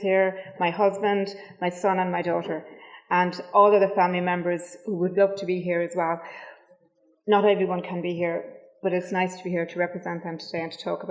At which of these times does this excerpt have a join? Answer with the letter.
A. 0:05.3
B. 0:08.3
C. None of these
B